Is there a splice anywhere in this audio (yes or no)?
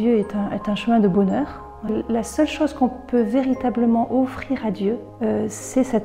yes